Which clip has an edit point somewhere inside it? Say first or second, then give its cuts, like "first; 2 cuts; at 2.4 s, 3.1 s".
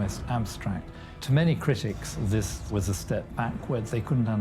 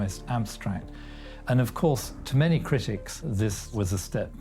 first; 1 cut; at 1.1 s